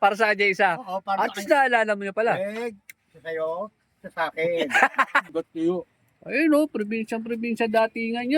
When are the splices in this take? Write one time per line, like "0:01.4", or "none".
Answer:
0:05.3